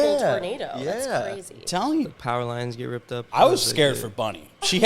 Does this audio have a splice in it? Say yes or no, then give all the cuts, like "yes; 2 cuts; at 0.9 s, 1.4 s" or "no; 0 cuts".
yes; 1 cut; at 2.1 s